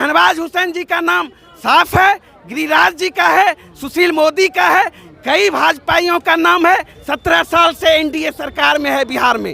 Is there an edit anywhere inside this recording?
yes; 1 cut; at 7.0 s

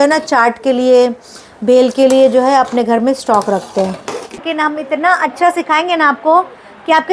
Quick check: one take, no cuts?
no; 1 cut; at 4.4 s

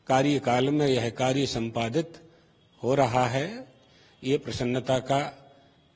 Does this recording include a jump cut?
no; 0 cuts

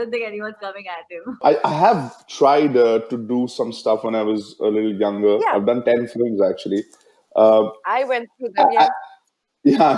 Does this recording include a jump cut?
yes; 1 cut; at 1.4 s

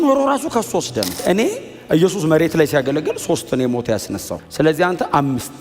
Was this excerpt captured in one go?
no; 2 cuts; at 1.2 s, 4.4 s

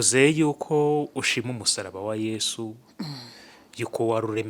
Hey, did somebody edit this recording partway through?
no; 0 cuts

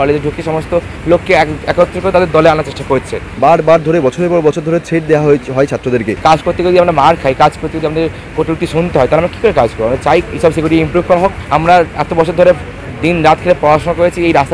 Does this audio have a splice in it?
yes; 3 cuts; at 3.3 s, 6.1 s, 11.4 s

